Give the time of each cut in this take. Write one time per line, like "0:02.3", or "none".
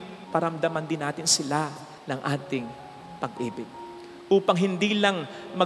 none

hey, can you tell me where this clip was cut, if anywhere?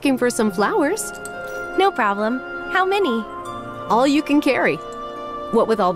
none

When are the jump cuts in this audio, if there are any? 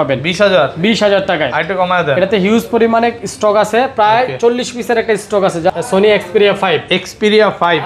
0:05.7

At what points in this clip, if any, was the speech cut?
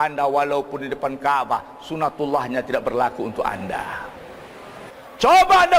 0:04.9

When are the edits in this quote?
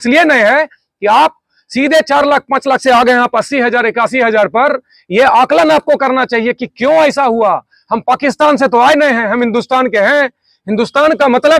0:07.7

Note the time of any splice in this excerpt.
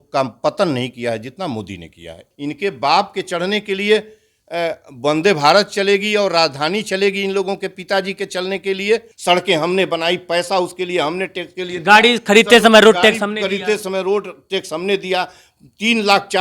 0:02.2
0:09.1

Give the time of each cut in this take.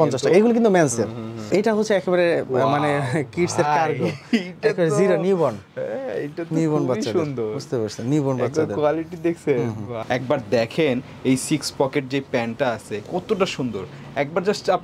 0:01.4
0:10.0

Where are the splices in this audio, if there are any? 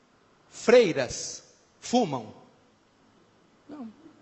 0:02.3

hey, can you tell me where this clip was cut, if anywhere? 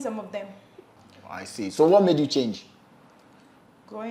0:00.9

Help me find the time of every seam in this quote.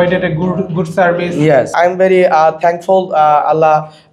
0:01.7

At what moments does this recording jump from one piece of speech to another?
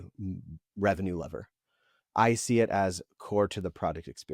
none

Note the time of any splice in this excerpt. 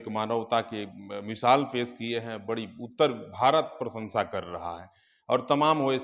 none

